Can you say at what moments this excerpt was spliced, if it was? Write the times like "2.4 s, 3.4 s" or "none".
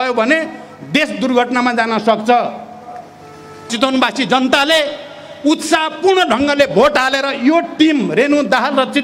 3.7 s